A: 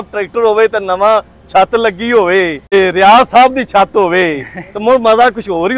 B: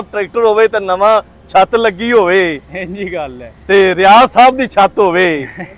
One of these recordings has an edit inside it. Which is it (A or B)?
A